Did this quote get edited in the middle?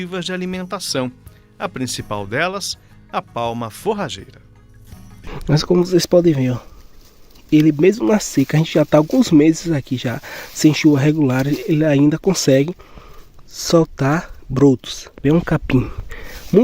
yes; 2 cuts; at 5.3 s, 15.2 s

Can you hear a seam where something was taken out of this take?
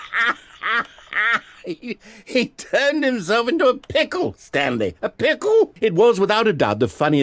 yes; 1 cut; at 5.7 s

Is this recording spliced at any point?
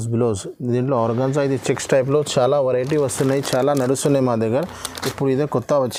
no; 0 cuts

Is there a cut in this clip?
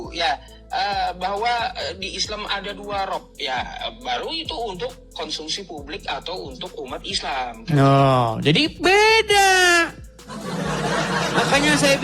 no; 0 cuts

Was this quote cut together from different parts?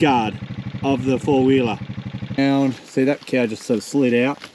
yes; 1 cut; at 2.4 s

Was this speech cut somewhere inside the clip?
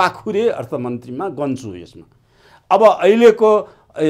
no; 0 cuts

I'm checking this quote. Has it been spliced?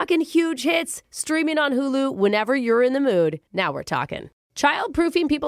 yes; 1 cut; at 4.4 s

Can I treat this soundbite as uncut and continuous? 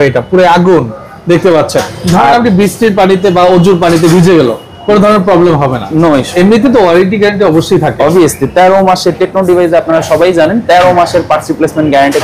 no; 2 cuts; at 1.9 s, 6.3 s

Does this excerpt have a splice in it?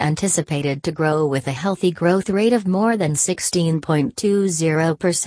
no; 0 cuts

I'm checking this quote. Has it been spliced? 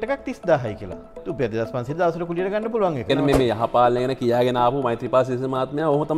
yes; 2 cuts; at 1.2 s, 3.1 s

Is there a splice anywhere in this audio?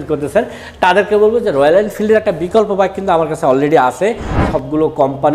yes; 1 cut; at 4.4 s

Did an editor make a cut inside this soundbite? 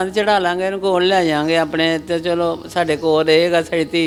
no; 0 cuts

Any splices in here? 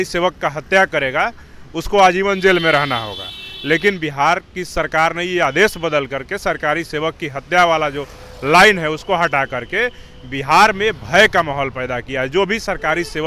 no; 0 cuts

